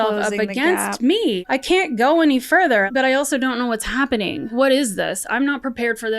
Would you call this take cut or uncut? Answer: cut